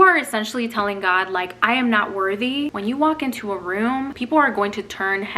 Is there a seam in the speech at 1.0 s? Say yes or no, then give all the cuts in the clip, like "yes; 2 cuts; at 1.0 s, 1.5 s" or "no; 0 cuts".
no; 2 cuts; at 2.7 s, 4.2 s